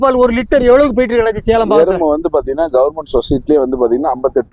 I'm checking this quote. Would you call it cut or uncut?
uncut